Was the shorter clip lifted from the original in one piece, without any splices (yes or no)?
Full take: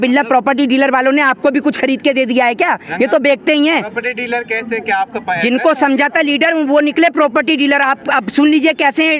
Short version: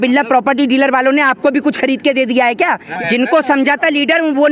no